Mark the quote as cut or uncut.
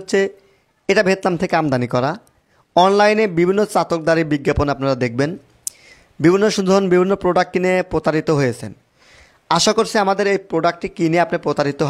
uncut